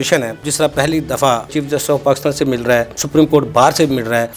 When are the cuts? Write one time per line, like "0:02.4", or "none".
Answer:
0:01.5